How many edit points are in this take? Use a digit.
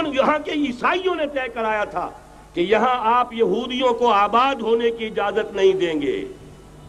0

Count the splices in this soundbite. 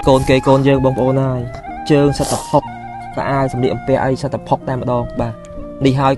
0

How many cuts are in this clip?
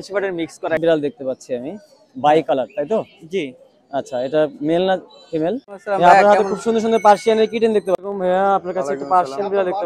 3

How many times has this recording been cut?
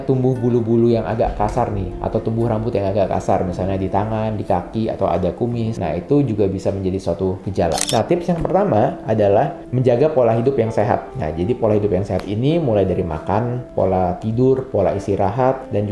1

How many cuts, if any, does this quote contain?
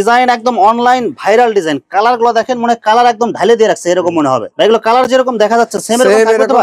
0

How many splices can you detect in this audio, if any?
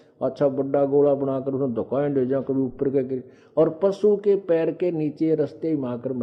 0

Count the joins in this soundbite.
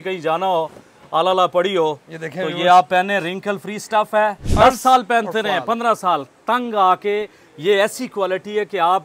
1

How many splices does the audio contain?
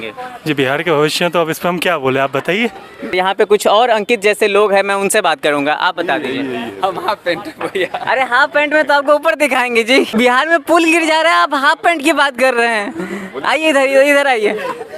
2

